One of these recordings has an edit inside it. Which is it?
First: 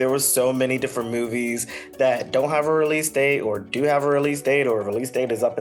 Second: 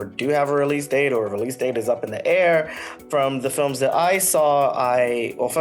second; 1 cut; at 3.0 s

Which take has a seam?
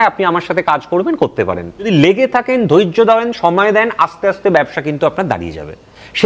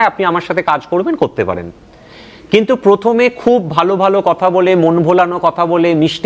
first; 1 cut; at 1.9 s

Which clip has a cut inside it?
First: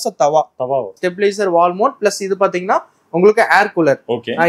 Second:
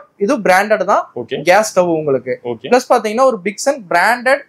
first; 1 cut; at 0.9 s

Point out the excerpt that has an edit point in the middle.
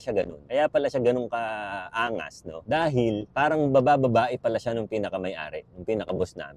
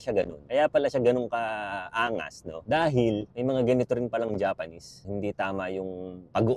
second; 1 cut; at 3.3 s

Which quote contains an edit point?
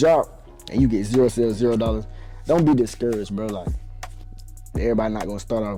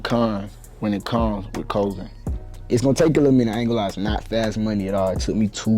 second; 1 cut; at 2.5 s

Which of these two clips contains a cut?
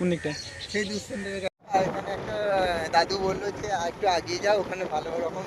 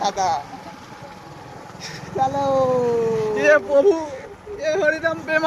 first; 1 cut; at 1.7 s

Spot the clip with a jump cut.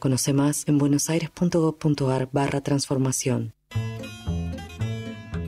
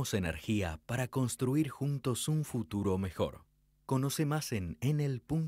first; 1 cut; at 3.6 s

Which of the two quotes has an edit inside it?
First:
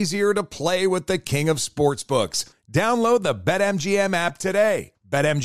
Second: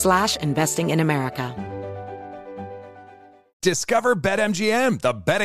second; 1 cut; at 1.5 s

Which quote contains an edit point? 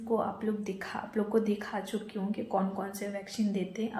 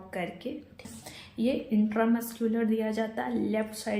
second; 1 cut; at 0.9 s

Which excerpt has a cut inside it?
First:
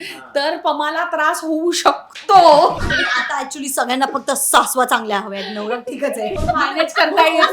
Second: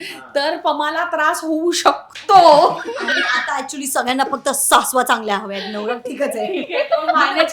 first; 2 cuts; at 2.8 s, 6.4 s

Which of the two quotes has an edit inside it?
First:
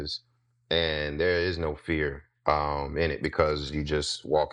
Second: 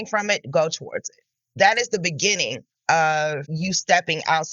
second; 2 cuts; at 1.4 s, 3.5 s

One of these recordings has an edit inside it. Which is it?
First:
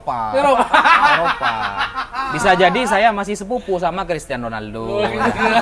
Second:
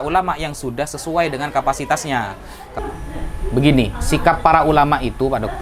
second; 1 cut; at 2.7 s

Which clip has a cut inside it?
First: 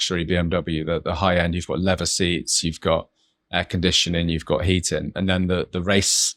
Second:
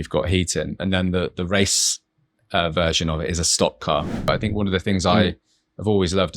second; 1 cut; at 4.3 s

